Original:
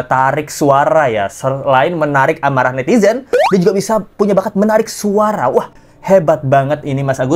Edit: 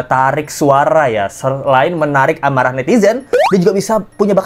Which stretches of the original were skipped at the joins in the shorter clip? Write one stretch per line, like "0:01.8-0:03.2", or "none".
none